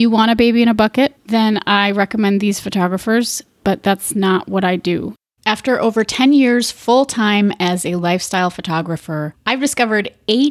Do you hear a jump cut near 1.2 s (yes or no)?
yes